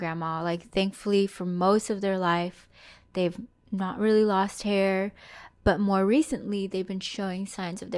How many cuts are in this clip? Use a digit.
0